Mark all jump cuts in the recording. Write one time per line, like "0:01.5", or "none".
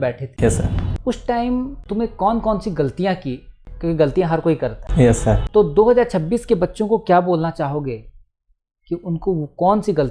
none